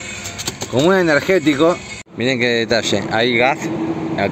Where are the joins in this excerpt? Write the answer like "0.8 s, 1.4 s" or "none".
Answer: 2.2 s